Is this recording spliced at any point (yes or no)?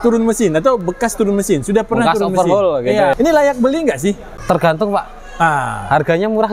yes